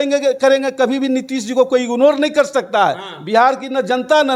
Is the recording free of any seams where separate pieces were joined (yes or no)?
yes